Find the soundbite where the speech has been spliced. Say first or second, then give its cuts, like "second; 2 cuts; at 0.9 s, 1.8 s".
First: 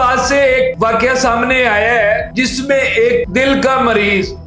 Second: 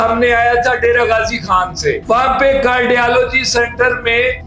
first; 3 cuts; at 0.7 s, 2.3 s, 3.3 s